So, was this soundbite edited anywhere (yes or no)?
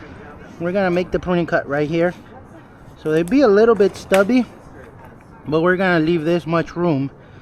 no